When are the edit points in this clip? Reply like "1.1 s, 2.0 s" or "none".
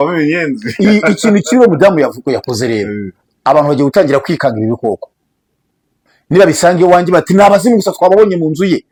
none

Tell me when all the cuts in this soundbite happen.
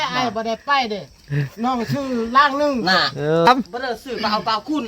3.5 s

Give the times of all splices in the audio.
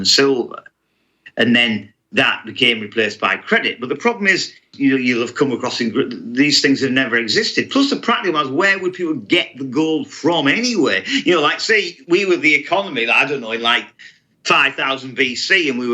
4.7 s

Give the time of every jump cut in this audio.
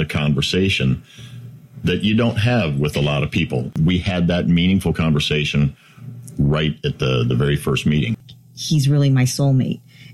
3.7 s, 8.1 s

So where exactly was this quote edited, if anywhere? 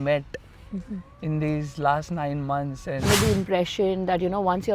3.1 s

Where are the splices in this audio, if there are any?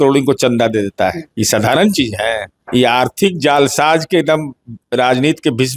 1.3 s, 2.5 s

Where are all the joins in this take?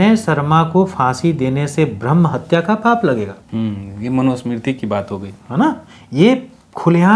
none

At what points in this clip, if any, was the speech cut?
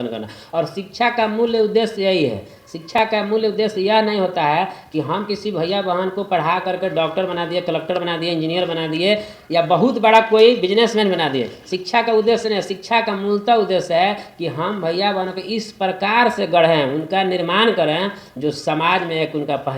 none

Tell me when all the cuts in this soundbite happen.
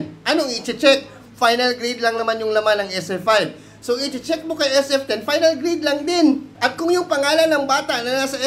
6.5 s

